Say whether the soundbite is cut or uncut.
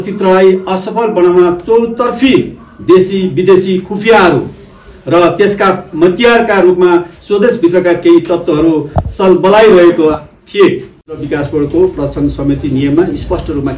cut